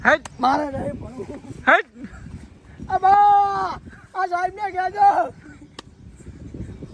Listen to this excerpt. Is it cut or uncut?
uncut